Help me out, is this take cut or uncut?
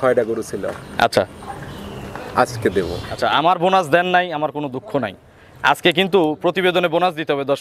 cut